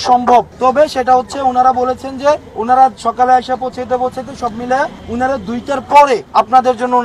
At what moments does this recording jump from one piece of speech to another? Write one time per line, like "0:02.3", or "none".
0:01.0
0:02.5
0:05.0
0:06.2